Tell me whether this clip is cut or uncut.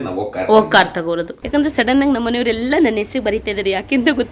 cut